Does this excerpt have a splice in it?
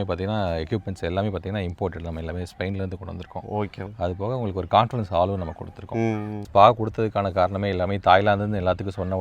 yes; 2 cuts; at 3.9 s, 6.4 s

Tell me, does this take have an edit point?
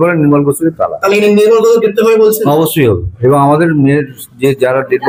no; 0 cuts

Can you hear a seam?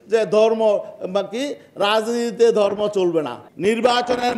yes; 1 cut; at 3.4 s

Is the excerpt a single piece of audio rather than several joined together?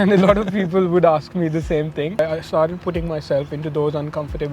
no; 1 cut; at 2.2 s

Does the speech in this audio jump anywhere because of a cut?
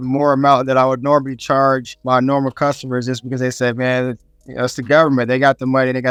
no; 0 cuts

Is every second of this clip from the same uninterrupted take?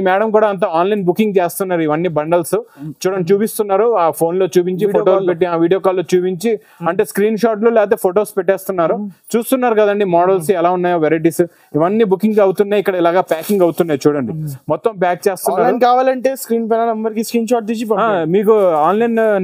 yes; 0 cuts

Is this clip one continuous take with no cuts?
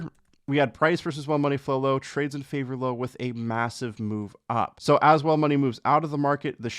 no; 1 cut; at 4.8 s

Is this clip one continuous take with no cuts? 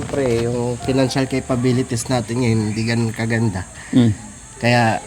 yes; 0 cuts

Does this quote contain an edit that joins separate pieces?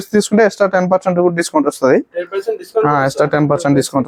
no; 0 cuts

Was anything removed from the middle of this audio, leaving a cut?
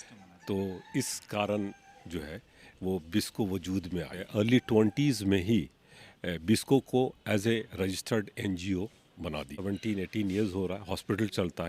yes; 2 cuts; at 4.2 s, 9.5 s

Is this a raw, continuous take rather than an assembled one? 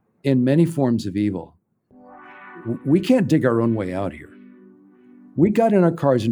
yes; 0 cuts

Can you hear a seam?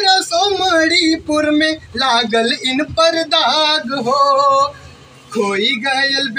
no; 0 cuts

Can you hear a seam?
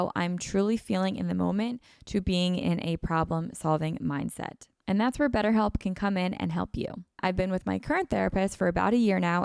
yes; 1 cut; at 7.2 s

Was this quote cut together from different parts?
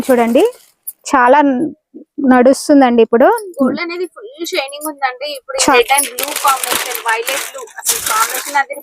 yes; 1 cut; at 5.7 s

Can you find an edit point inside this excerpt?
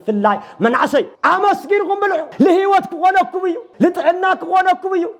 yes; 3 cuts; at 1.1 s, 2.3 s, 3.6 s

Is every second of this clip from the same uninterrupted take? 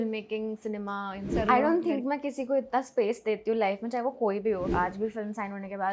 no; 2 cuts; at 1.3 s, 4.7 s

